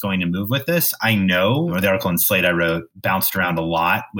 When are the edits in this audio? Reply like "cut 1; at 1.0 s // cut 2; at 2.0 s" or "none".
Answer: cut 1; at 1.7 s